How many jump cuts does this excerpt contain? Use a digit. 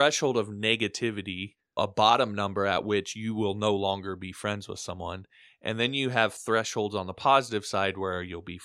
1